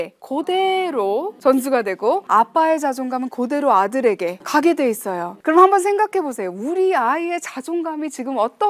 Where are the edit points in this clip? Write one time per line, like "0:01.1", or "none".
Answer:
0:01.3
0:02.2
0:04.4
0:05.3